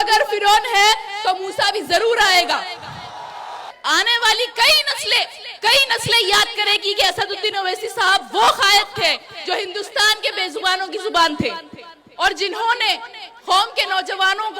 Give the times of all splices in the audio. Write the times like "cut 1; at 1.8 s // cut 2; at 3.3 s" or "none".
cut 1; at 3.7 s